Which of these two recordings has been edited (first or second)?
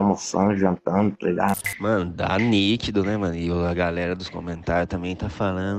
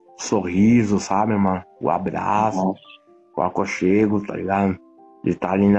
first